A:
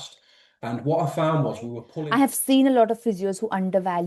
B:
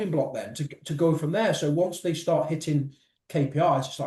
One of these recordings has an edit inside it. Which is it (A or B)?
A